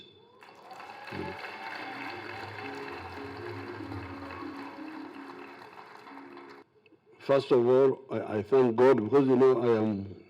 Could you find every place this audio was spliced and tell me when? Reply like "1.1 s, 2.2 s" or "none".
6.7 s